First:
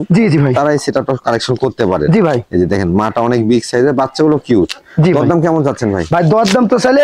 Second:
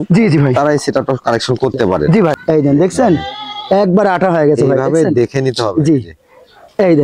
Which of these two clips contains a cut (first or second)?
second